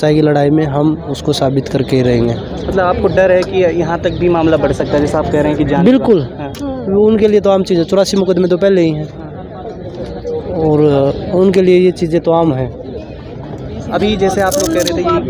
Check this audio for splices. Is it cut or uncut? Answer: uncut